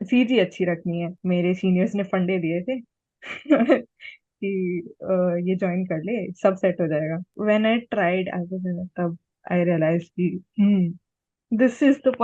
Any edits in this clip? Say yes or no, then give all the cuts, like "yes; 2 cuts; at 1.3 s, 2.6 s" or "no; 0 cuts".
yes; 2 cuts; at 1.1 s, 7.3 s